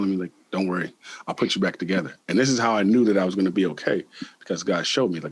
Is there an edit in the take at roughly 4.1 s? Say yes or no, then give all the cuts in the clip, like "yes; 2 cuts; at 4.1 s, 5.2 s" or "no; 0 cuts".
no; 0 cuts